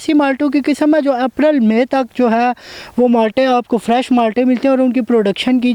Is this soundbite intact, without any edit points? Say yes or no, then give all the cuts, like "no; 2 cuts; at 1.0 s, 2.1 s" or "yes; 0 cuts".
yes; 0 cuts